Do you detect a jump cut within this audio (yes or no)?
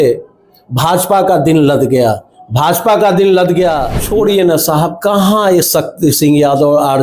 yes